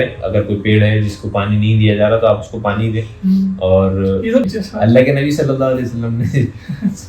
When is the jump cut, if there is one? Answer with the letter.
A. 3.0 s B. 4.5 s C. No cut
B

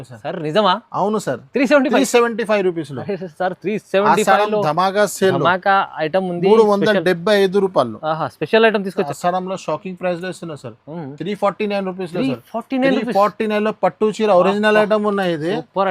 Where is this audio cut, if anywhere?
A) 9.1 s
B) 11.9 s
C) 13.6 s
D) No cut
A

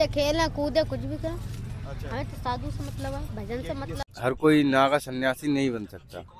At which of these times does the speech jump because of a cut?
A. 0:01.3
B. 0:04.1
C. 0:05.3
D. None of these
B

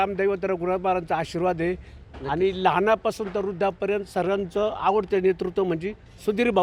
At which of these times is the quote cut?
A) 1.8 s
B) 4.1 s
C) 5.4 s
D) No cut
D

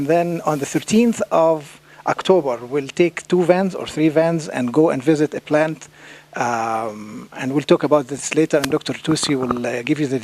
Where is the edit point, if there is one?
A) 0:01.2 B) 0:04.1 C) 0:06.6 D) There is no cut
A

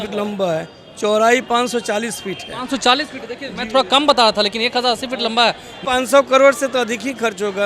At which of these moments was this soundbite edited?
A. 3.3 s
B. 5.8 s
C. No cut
B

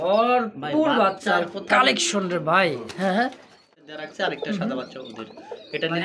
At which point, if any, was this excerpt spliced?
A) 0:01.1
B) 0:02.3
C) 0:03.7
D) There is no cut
C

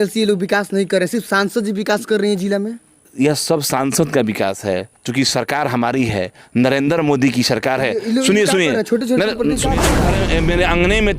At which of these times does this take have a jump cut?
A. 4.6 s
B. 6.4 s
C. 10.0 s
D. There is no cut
C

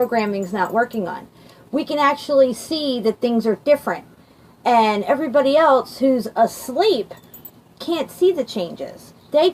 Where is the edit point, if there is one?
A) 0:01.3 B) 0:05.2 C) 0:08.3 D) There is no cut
B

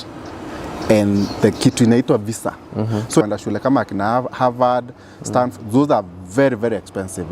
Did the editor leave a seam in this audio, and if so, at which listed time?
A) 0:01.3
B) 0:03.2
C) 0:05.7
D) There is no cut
B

